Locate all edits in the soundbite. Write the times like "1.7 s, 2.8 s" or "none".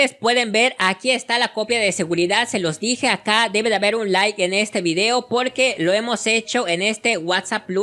none